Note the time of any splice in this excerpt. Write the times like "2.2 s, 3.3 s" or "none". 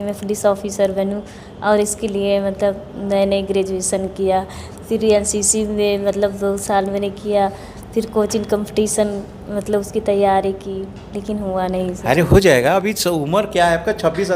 none